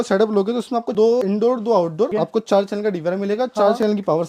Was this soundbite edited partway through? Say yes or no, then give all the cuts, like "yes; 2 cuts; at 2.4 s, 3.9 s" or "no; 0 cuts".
yes; 1 cut; at 2.1 s